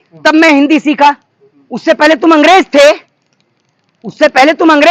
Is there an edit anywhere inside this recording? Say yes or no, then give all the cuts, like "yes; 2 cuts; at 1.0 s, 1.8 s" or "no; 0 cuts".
no; 0 cuts